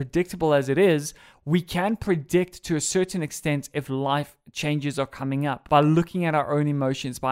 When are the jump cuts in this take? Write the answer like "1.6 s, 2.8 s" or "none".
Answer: 5.6 s